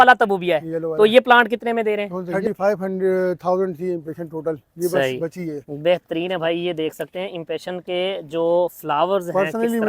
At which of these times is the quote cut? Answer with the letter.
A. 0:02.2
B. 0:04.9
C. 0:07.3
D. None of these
A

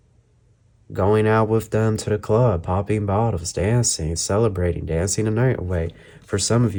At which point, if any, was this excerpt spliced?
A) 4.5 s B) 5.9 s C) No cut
C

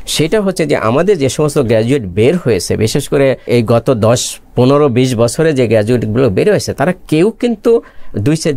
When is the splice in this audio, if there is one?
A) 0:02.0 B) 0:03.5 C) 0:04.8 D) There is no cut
B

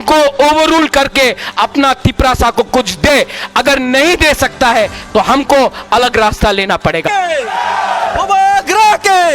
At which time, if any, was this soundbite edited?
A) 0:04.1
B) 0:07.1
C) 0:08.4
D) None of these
B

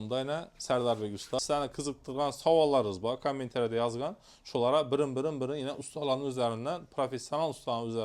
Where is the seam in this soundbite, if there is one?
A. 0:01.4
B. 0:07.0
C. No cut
A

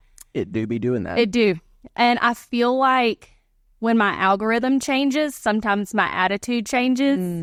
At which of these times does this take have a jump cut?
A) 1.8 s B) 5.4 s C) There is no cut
C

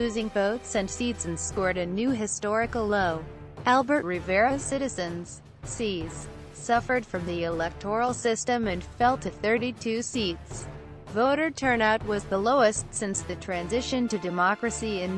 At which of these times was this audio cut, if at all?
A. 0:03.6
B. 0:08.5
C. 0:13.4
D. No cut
C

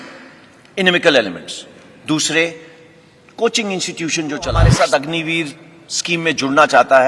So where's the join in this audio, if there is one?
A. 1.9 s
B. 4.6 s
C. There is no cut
B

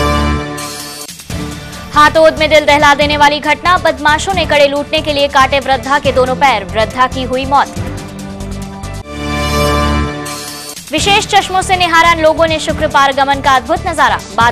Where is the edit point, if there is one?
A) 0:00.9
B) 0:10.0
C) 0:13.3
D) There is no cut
A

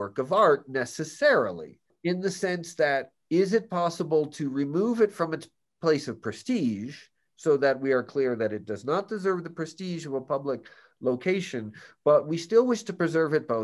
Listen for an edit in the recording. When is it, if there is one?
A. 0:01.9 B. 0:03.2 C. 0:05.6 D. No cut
A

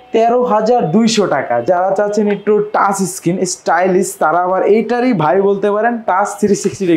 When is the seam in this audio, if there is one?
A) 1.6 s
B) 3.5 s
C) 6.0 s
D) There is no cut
A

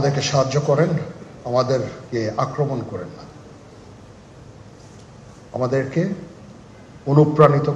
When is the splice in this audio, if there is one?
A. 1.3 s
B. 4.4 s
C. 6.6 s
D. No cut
B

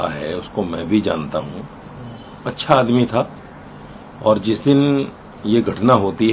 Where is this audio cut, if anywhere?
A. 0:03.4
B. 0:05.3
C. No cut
C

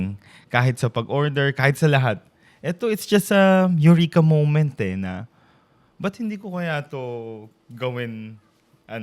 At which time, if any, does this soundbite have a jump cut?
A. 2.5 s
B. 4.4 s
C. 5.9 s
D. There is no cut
D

